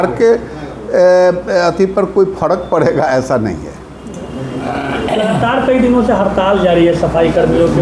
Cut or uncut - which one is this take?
uncut